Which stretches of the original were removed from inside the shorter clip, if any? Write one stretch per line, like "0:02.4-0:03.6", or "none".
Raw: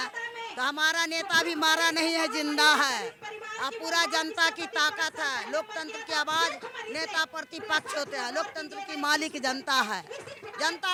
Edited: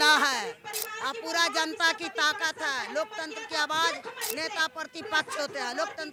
none